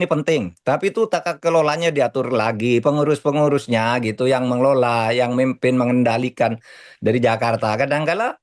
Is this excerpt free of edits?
yes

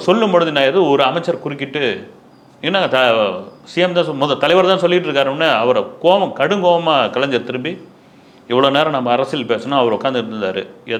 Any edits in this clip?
no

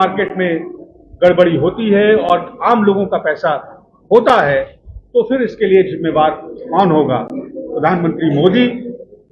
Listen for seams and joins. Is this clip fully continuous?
yes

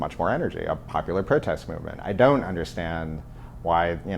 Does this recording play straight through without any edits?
no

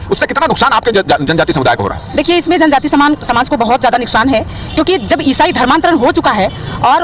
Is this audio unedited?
yes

